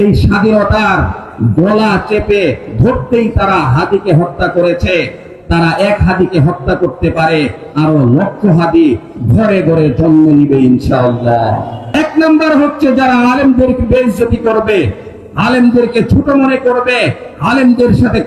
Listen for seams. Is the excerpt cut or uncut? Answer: cut